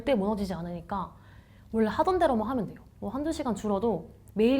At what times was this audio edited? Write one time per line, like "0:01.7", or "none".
0:02.8